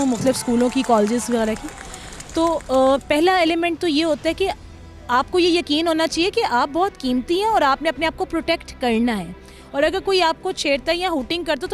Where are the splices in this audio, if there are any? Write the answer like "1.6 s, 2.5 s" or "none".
none